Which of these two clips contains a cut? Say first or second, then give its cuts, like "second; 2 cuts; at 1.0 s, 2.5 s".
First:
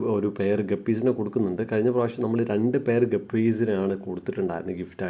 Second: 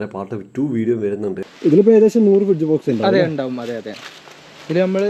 second; 1 cut; at 1.5 s